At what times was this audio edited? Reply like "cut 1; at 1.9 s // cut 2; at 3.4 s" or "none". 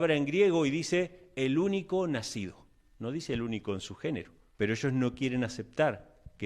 cut 1; at 4.4 s

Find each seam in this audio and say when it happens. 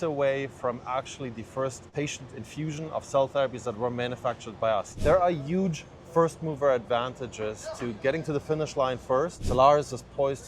cut 1; at 1.9 s // cut 2; at 4.9 s // cut 3; at 9.4 s

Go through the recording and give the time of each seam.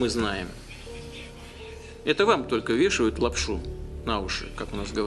cut 1; at 3.2 s

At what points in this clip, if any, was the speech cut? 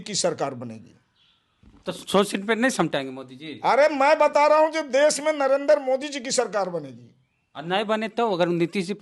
none

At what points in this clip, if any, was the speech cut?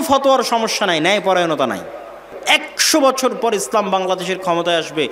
cut 1; at 2.3 s

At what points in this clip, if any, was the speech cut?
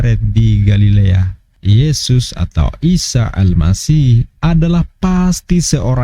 cut 1; at 1.5 s

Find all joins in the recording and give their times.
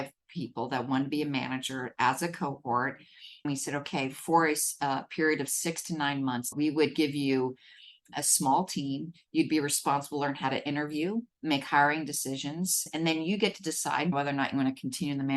cut 1; at 3.4 s // cut 2; at 6.5 s // cut 3; at 8.1 s // cut 4; at 12.8 s // cut 5; at 14.1 s

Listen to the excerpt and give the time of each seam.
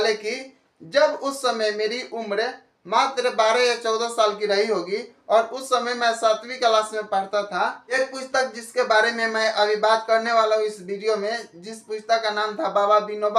cut 1; at 7.8 s

